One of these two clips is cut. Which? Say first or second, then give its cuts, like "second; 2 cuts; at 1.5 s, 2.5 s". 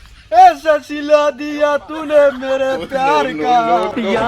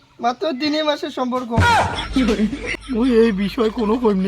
second; 1 cut; at 2.6 s